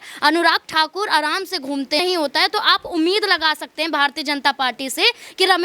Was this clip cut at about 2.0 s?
yes; 1 cut; at 2.0 s

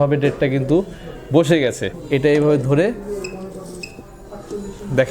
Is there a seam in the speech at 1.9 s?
yes; 1 cut; at 1.9 s

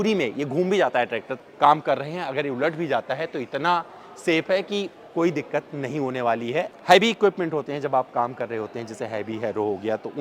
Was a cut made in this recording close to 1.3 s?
yes; 2 cuts; at 1.3 s, 6.7 s

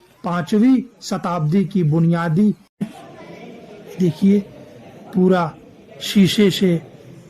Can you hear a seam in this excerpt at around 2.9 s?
yes; 1 cut; at 2.9 s

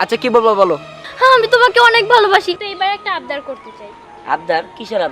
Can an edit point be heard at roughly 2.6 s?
yes; 1 cut; at 2.6 s

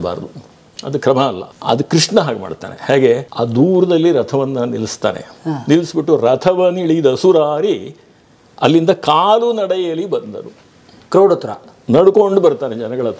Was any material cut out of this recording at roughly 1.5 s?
yes; 2 cuts; at 1.5 s, 3.3 s

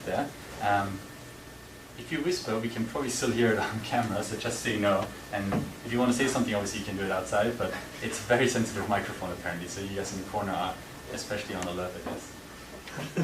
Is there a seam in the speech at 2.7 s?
yes; 1 cut; at 2.7 s

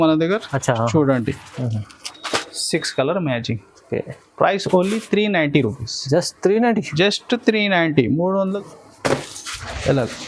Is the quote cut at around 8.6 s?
yes; 2 cuts; at 1.5 s, 8.6 s

